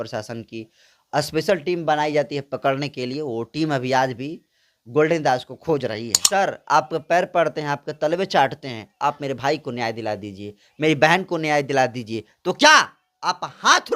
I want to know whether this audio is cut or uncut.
cut